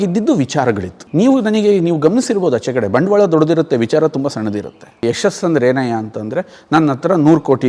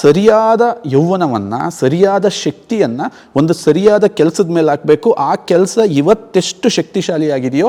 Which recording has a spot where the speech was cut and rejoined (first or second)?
first